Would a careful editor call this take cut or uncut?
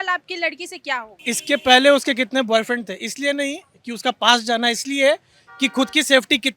cut